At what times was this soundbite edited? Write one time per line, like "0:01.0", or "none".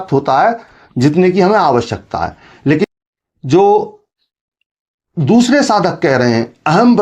0:02.8